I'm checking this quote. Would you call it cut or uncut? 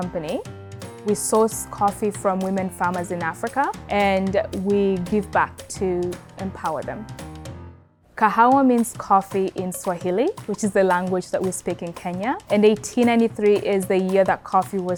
uncut